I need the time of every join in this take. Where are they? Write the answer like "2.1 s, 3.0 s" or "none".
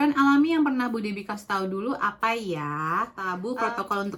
3.2 s